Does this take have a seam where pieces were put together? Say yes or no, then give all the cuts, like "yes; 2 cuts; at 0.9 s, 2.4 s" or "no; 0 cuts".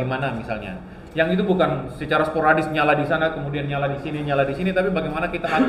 no; 0 cuts